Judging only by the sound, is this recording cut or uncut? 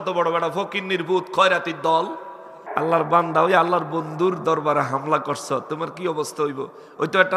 cut